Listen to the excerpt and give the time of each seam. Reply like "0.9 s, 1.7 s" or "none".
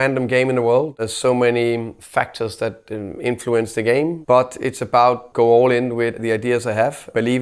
1.0 s

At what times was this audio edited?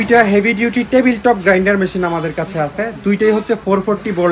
none

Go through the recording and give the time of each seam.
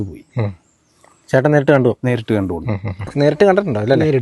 3.0 s

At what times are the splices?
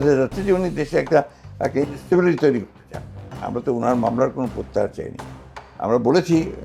3.3 s

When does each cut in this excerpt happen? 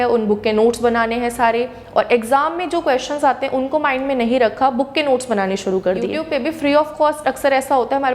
6.2 s

